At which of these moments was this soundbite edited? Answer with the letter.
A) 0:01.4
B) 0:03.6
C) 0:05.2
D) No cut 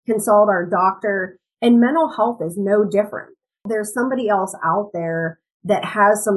B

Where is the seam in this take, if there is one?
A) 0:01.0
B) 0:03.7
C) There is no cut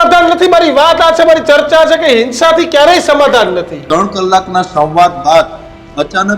B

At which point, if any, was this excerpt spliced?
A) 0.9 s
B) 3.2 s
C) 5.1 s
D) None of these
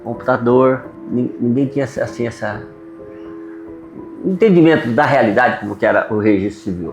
A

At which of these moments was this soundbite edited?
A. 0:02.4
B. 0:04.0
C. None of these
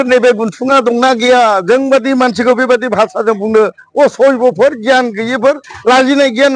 C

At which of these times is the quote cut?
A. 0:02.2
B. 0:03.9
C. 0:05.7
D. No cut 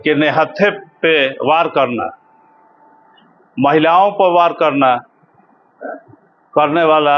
D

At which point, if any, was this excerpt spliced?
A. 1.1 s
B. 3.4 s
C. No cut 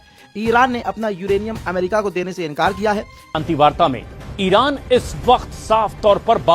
B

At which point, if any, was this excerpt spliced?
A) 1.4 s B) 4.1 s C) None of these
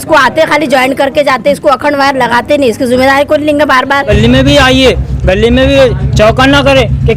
B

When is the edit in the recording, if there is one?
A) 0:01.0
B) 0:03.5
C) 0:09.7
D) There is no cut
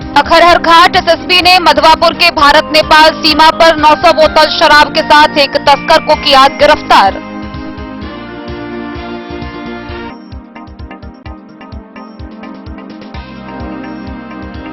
D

